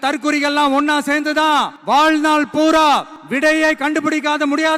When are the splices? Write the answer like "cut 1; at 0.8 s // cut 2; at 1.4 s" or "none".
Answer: cut 1; at 1.8 s // cut 2; at 3.2 s